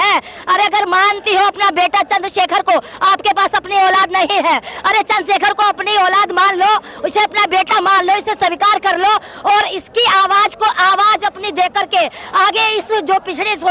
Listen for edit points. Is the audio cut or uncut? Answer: uncut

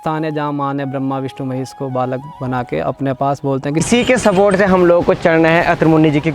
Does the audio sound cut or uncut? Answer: cut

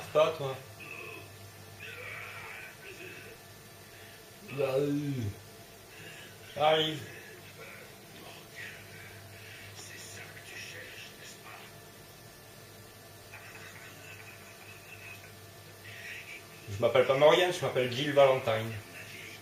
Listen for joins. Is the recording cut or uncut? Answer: uncut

